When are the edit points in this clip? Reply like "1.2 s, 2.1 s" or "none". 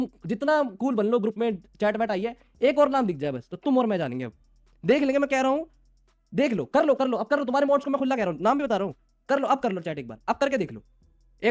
none